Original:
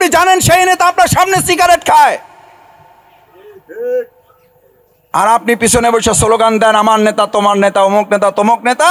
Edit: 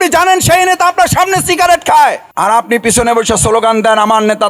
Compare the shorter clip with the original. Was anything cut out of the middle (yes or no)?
yes